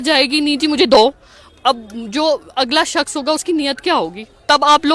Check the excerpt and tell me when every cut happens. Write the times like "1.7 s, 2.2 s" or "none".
none